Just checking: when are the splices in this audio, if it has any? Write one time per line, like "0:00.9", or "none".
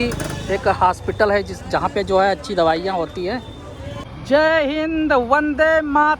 0:03.9

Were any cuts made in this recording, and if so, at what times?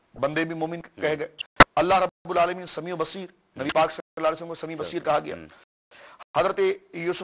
0:01.4

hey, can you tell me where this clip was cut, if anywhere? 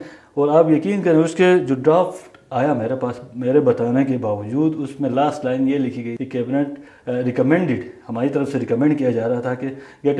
0:06.2

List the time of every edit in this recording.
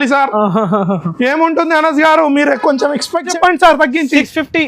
0:03.3

